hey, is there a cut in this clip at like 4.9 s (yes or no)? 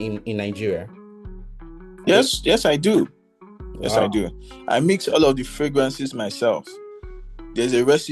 no